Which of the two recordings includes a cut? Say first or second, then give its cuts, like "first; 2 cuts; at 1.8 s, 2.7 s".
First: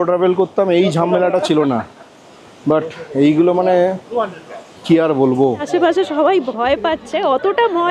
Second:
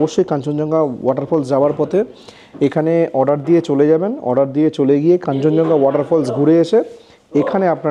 first; 1 cut; at 5.6 s